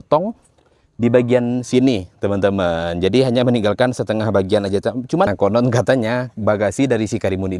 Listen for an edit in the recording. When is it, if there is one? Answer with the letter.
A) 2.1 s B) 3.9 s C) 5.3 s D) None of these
C